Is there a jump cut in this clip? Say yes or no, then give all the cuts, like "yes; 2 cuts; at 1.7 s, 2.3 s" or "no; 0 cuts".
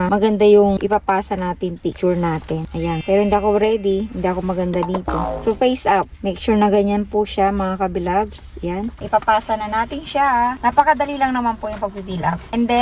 no; 0 cuts